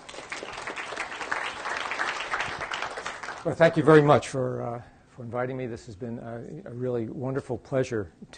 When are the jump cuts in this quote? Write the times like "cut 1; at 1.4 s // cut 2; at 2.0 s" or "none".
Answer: cut 1; at 2.6 s